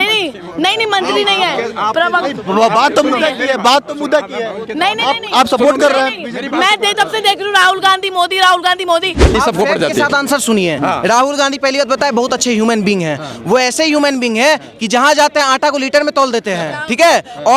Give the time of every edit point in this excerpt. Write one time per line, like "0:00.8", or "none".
0:09.3